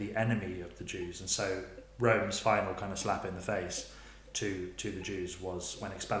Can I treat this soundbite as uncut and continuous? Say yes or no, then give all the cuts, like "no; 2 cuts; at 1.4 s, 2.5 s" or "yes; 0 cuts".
yes; 0 cuts